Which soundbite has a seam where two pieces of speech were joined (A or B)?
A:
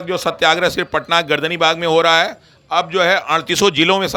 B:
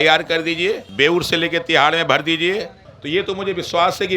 B